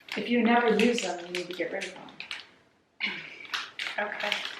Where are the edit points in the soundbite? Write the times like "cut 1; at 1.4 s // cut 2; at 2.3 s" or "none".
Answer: none